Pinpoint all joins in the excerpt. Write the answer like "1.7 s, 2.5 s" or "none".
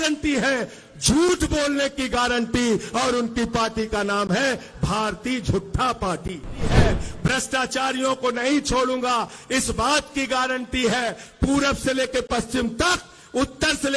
6.7 s

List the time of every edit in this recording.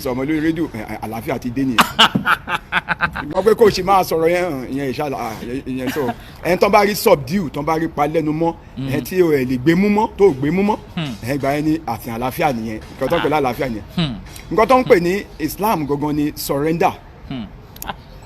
none

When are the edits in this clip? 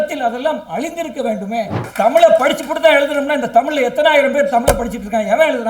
1.8 s

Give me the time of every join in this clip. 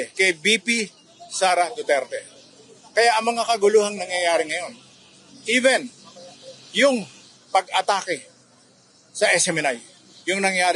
none

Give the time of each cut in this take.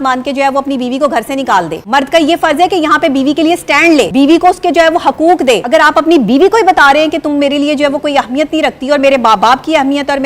1.8 s, 4.1 s, 5.6 s

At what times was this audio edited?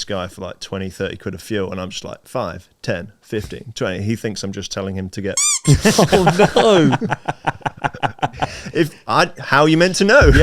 8.6 s

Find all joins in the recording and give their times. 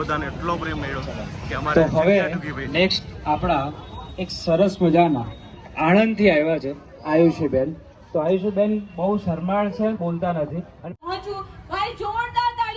11.1 s

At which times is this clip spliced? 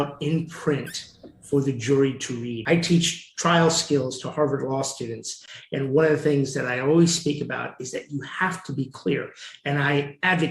2.5 s

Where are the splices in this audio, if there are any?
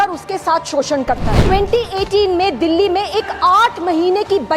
1.4 s

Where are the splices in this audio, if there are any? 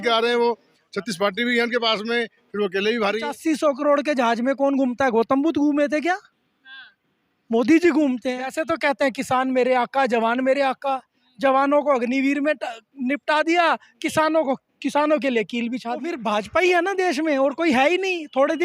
3.3 s, 8.6 s, 16.1 s

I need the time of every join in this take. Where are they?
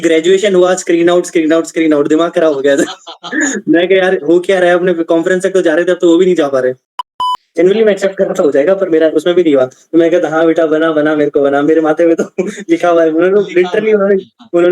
7.1 s

